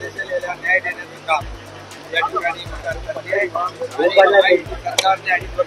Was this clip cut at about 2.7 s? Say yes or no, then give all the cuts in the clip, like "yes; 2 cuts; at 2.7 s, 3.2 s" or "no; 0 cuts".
yes; 1 cut; at 2.7 s